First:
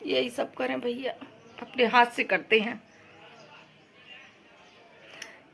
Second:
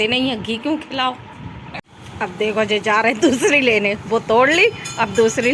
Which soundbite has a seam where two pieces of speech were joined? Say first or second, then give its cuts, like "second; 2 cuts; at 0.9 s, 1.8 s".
second; 1 cut; at 1.6 s